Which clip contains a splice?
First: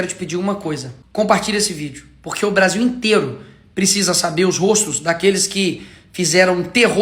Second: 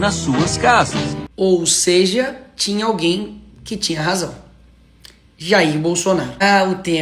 second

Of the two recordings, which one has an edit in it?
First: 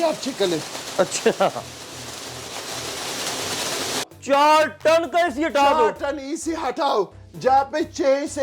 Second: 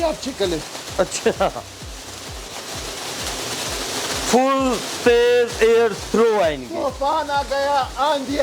first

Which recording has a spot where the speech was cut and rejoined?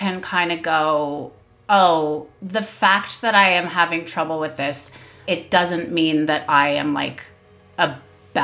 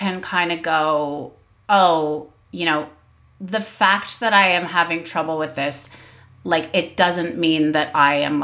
first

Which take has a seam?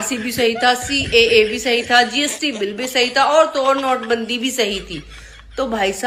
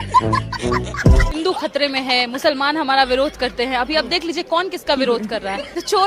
second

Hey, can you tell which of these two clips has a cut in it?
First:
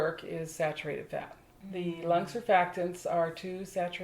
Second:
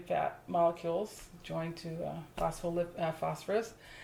first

